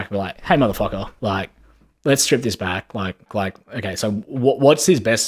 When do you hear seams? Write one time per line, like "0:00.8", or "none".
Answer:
0:03.3